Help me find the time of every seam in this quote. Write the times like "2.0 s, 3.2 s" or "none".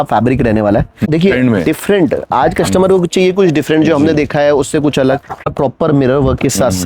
1.0 s, 5.5 s